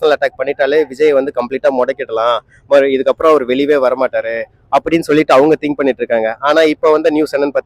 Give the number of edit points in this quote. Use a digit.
0